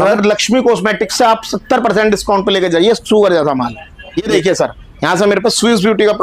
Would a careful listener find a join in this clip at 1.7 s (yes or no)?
no